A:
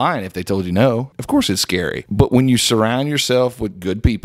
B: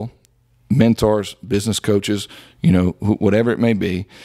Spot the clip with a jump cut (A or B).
A